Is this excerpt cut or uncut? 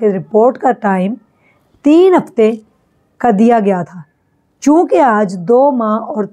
uncut